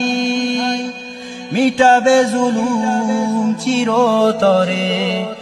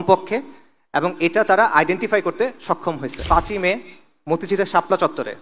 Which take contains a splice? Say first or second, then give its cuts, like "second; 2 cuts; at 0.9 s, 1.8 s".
second; 1 cut; at 3.1 s